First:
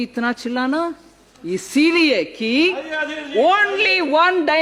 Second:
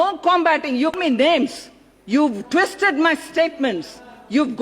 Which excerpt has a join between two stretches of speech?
second; 1 cut; at 1.0 s

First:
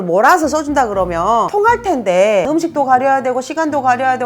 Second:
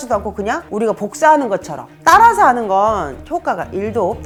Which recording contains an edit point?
first; 2 cuts; at 1.5 s, 2.5 s

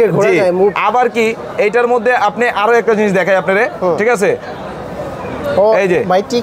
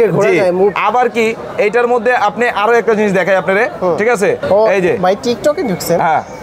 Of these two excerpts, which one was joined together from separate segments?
second; 1 cut; at 4.4 s

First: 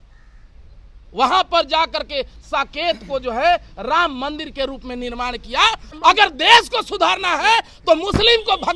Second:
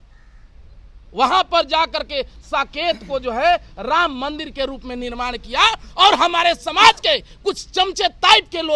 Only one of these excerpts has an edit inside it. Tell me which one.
first; 1 cut; at 5.9 s

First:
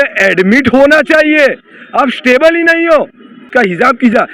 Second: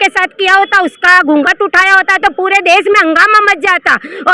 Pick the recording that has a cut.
first; 1 cut; at 3.3 s

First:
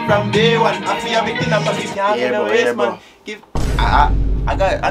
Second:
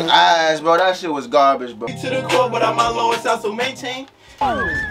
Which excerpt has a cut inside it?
second; 1 cut; at 1.9 s

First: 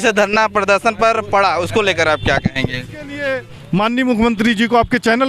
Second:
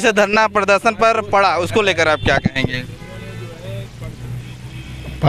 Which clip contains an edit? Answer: first; 1 cut; at 3.2 s

